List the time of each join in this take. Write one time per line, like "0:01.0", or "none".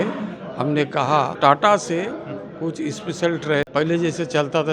0:01.3
0:03.7